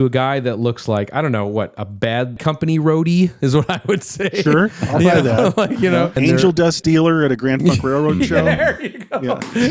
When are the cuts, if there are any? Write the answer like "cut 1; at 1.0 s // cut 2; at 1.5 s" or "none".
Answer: cut 1; at 2.4 s // cut 2; at 6.1 s